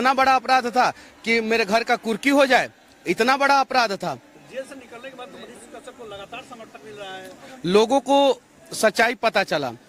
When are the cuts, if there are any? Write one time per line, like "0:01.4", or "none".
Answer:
none